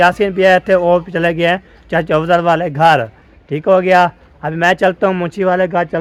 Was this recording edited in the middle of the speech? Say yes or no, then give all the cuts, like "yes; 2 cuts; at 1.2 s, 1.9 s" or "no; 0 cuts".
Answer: no; 0 cuts